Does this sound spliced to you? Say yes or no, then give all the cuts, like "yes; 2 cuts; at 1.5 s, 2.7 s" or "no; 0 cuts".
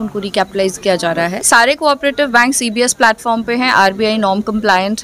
yes; 1 cut; at 1.4 s